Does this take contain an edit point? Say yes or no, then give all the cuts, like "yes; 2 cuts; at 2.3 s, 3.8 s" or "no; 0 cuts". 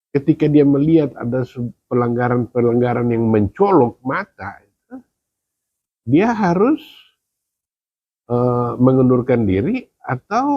no; 0 cuts